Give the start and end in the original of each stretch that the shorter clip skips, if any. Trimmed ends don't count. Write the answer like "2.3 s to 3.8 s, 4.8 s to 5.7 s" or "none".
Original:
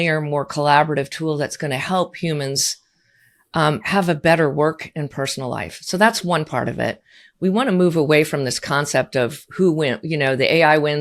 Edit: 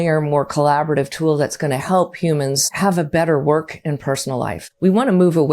2.7 s to 3.8 s, 5.7 s to 7.2 s